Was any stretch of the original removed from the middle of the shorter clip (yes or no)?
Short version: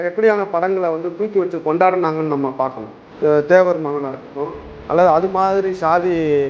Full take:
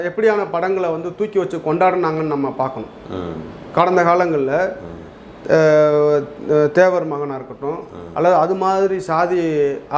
yes